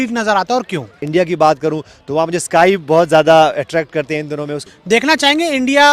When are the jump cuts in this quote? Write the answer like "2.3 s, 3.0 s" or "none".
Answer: 1.0 s, 4.6 s